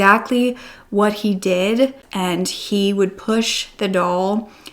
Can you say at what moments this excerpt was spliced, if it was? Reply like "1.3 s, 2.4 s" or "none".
2.0 s